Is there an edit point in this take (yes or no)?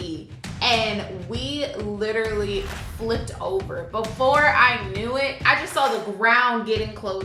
yes